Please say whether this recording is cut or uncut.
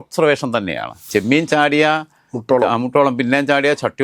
cut